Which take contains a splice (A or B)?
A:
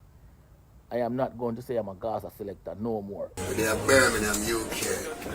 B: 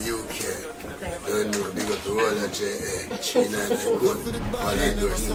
A